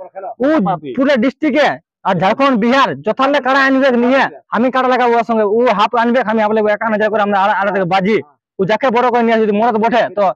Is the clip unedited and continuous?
yes; 0 cuts

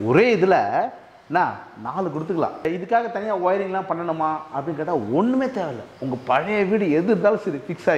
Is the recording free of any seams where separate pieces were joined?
no; 1 cut; at 2.6 s

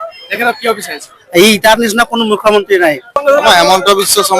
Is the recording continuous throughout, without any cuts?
no; 1 cut; at 3.2 s

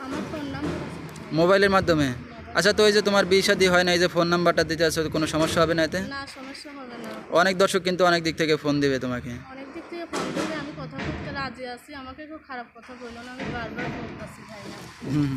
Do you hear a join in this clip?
no; 0 cuts

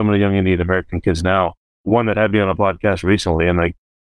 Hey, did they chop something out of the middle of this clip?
yes; 1 cut; at 1.7 s

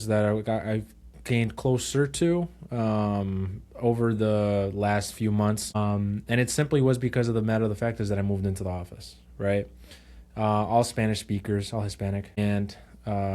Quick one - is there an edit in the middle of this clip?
yes; 2 cuts; at 5.8 s, 12.4 s

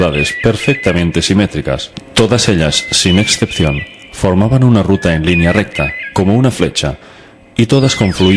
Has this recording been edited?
no; 0 cuts

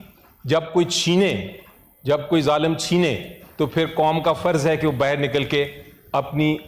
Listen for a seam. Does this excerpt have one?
no; 0 cuts

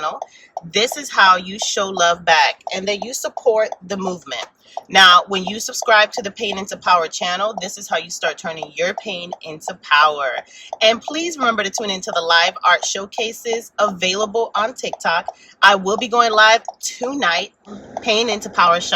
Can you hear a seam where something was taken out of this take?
yes; 1 cut; at 17.7 s

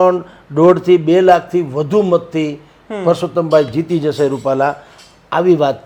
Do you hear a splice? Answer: no; 0 cuts

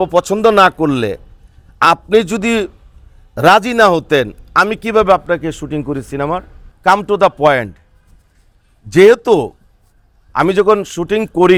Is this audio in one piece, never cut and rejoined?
yes; 0 cuts

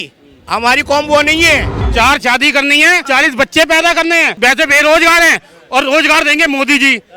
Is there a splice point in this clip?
yes; 3 cuts; at 1.8 s, 3.0 s, 4.3 s

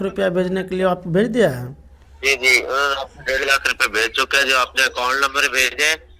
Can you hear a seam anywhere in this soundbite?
no; 0 cuts

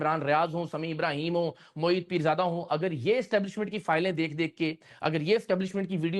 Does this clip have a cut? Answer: no; 0 cuts

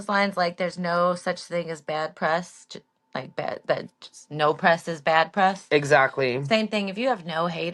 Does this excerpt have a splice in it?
no; 0 cuts

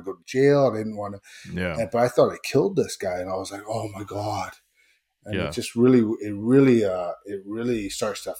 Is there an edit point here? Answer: no; 0 cuts

